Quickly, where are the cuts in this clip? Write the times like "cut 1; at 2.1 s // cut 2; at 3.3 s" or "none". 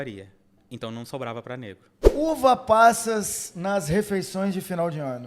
cut 1; at 1.9 s